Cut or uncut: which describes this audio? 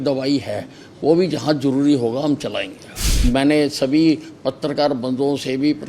cut